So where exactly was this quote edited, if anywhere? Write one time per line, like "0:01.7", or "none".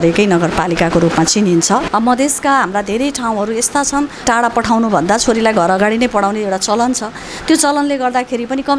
0:01.9
0:04.2